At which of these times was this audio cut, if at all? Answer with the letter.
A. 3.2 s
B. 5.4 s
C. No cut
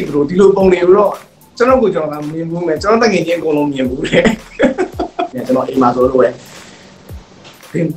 B